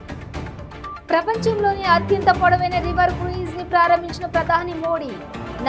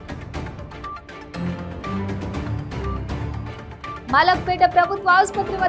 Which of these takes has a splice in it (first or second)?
first